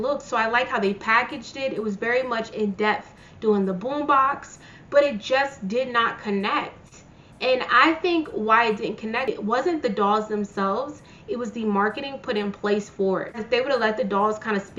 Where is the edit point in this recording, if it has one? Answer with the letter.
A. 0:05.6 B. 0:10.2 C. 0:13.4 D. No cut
C